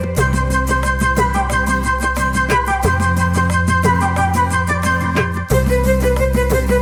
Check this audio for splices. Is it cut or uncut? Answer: uncut